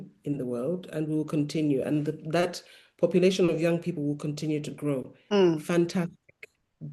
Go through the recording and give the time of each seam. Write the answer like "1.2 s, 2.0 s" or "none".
none